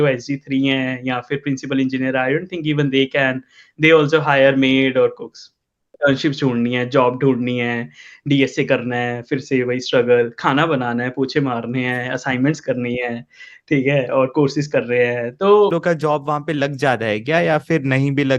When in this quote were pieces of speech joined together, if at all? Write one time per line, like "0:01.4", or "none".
0:05.9
0:15.7